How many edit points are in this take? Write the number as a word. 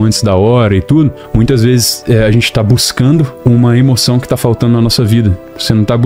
two